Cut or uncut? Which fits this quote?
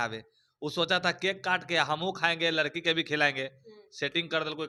uncut